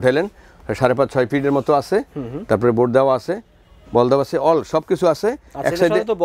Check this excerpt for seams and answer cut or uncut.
uncut